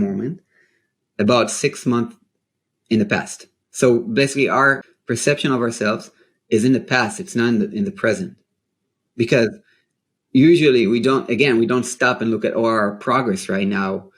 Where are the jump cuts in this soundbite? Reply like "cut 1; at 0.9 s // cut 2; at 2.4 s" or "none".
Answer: cut 1; at 4.9 s